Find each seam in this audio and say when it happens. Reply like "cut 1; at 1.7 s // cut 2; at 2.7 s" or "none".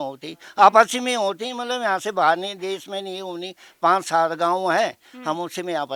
none